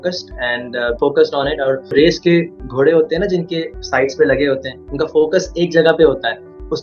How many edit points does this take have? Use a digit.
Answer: 2